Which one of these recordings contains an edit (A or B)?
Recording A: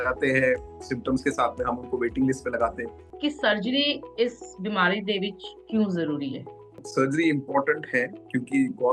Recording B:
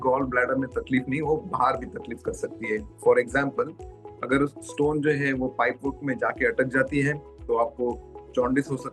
A